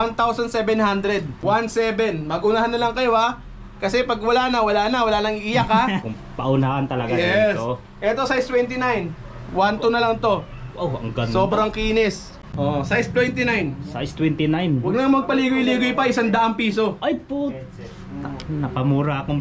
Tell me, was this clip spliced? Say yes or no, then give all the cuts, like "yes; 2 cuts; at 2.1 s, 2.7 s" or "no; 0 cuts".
yes; 3 cuts; at 1.3 s, 6.0 s, 12.4 s